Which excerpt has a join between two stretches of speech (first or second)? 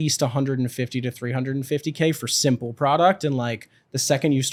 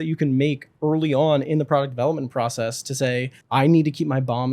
second